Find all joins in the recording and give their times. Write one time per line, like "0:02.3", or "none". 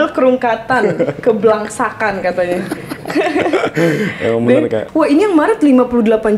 0:04.9